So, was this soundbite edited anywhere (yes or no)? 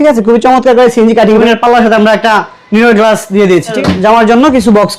yes